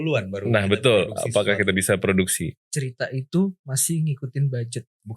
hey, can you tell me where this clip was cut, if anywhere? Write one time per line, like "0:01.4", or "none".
0:02.6